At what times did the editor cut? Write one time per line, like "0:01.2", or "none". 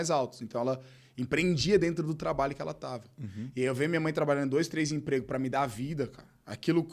none